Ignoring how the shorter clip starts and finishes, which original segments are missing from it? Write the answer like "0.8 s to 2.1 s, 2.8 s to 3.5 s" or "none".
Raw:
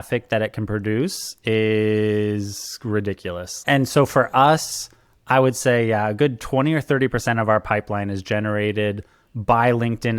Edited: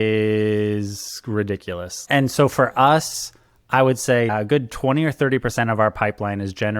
5.9 s to 6.0 s